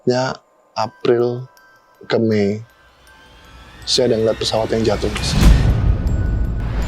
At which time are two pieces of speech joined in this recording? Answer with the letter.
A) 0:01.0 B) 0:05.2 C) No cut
B